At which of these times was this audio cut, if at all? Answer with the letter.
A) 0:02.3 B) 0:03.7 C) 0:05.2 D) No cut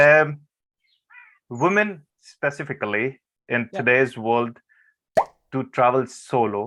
D